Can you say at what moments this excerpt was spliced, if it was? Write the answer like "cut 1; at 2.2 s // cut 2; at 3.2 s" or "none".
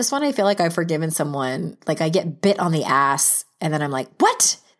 none